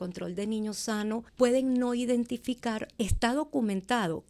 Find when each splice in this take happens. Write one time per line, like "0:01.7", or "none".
0:01.3
0:02.9